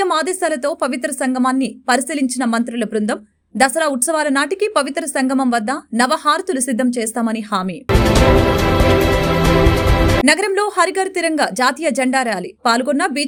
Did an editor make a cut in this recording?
no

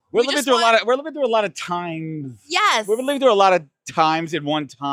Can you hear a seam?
no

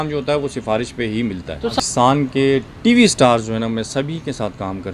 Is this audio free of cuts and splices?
no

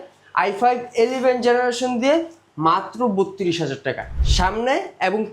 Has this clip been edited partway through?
yes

